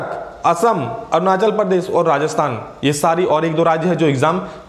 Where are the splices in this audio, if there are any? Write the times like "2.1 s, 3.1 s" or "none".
none